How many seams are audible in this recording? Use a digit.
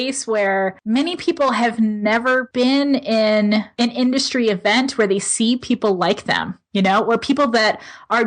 3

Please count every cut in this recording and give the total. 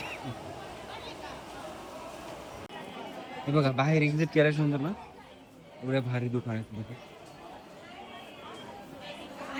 0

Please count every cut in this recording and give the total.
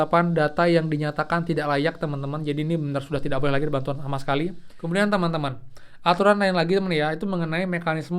1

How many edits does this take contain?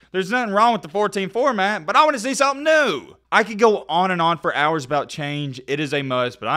0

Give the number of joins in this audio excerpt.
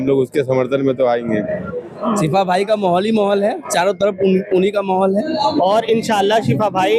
2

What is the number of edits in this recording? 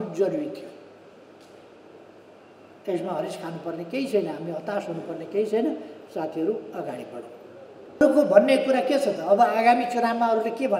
1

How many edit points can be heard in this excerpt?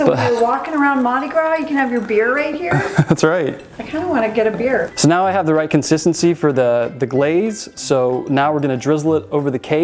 0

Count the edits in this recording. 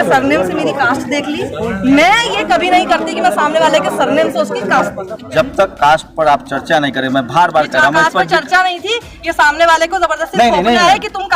1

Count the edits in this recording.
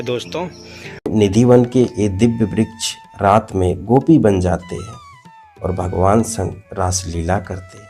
1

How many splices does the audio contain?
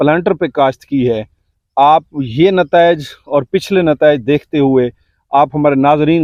0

